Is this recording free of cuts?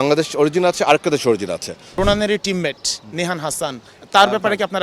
no; 2 cuts; at 1.9 s, 3.9 s

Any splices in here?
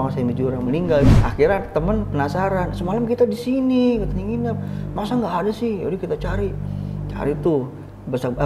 yes; 1 cut; at 1.1 s

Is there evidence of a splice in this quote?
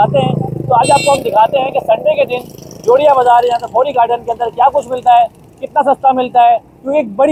no; 0 cuts

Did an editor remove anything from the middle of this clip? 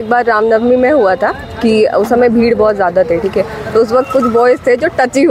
no; 0 cuts

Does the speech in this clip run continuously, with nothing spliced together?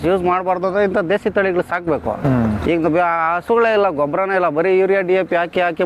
yes; 0 cuts

